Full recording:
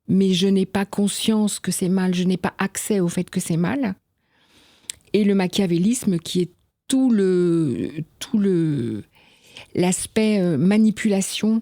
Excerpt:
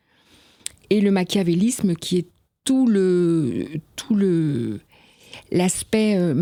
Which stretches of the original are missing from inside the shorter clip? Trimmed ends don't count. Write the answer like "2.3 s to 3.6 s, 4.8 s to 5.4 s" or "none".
none